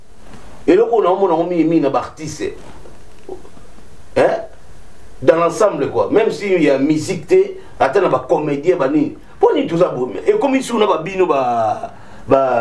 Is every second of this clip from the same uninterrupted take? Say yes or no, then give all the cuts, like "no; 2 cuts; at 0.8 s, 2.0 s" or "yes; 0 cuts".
yes; 0 cuts